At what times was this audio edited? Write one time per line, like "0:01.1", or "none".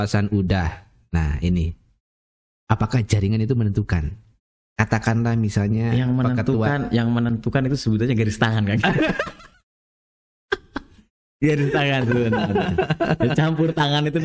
none